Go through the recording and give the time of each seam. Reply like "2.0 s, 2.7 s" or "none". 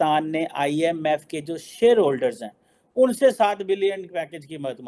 none

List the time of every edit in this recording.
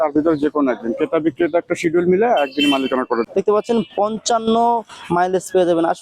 3.3 s

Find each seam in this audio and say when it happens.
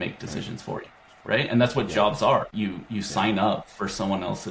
2.5 s

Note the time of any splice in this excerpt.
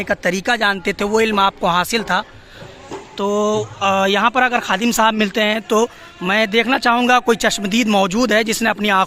2.6 s

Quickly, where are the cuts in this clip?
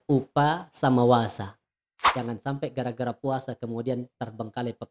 2.0 s

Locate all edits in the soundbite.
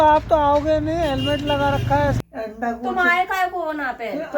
2.2 s

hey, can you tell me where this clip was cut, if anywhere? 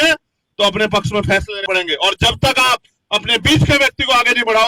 1.6 s

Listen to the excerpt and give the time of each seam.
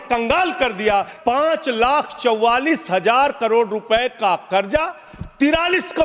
1.1 s

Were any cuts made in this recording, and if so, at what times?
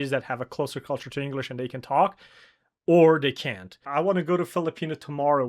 3.7 s

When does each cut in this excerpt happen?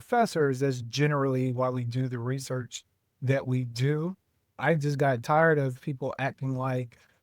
4.6 s

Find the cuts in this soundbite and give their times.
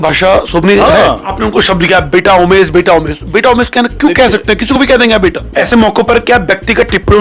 1.3 s, 5.5 s

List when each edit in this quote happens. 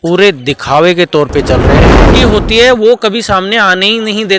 2.1 s

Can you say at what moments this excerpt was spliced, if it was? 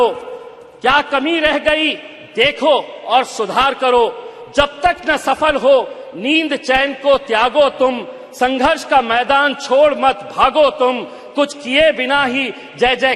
none

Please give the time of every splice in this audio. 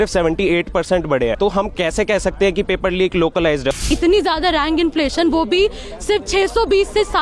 1.4 s, 3.8 s

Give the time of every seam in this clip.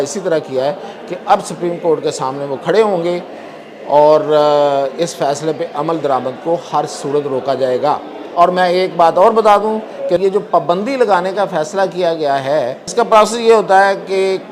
10.2 s, 12.8 s

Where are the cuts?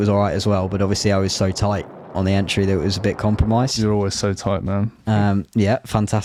none

